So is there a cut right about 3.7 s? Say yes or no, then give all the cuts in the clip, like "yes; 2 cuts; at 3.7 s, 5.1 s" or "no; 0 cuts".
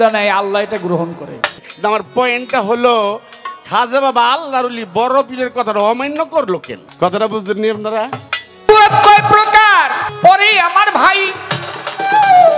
no; 4 cuts; at 1.6 s, 6.8 s, 8.7 s, 10.0 s